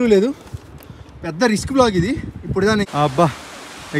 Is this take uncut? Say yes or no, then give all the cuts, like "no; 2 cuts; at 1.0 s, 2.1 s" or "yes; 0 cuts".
no; 1 cut; at 2.9 s